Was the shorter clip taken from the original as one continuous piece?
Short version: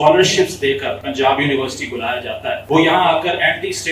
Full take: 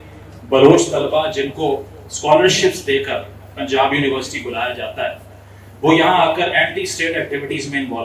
no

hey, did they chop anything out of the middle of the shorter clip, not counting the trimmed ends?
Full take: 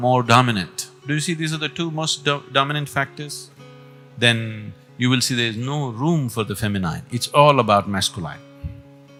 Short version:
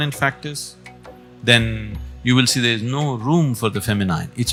no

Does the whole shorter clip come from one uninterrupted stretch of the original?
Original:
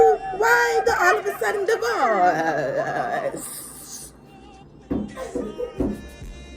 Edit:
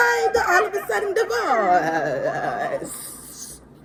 yes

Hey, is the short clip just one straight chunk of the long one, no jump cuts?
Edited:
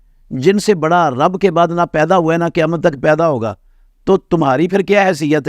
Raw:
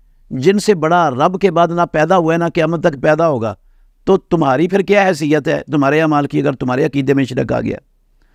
yes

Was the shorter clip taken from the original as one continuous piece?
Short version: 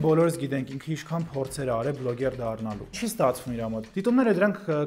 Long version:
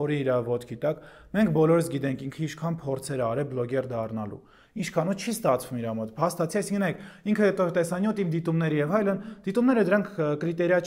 no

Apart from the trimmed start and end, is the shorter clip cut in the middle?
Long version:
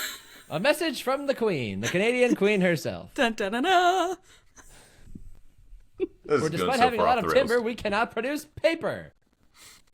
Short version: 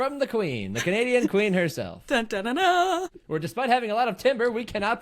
yes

